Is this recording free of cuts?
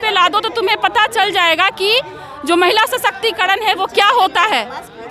yes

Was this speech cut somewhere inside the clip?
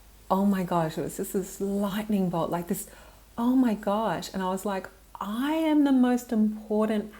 no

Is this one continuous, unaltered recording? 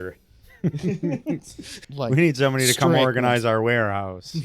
no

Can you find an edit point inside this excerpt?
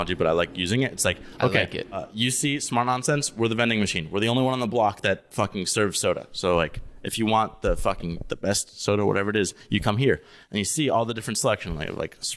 yes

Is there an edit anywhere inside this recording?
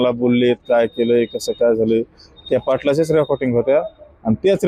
no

